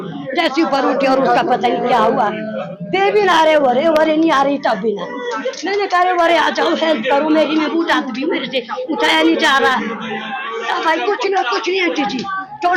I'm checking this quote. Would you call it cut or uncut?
uncut